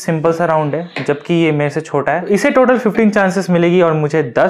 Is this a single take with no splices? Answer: no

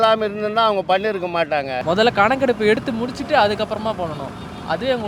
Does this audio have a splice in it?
yes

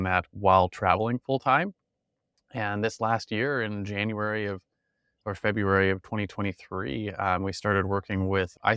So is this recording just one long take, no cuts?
yes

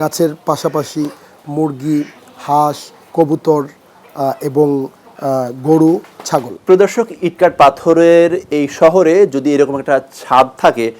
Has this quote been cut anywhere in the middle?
yes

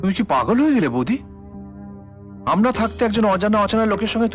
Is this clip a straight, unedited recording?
yes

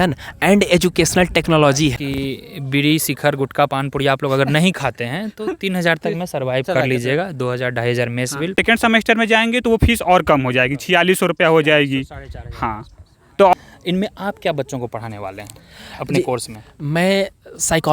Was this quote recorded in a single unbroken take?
no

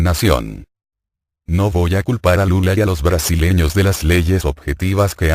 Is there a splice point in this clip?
no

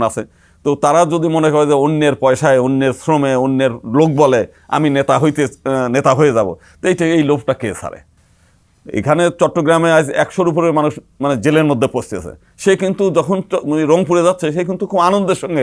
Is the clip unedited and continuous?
yes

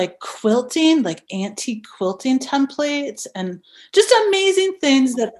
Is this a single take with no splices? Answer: yes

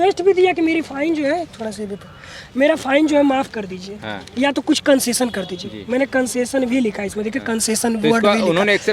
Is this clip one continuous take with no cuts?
yes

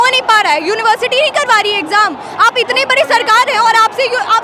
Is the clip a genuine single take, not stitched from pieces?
yes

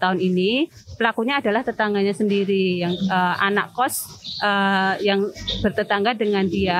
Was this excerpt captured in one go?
yes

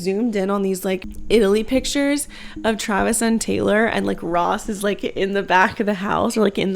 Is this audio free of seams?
no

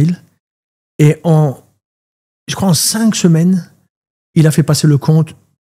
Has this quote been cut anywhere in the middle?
no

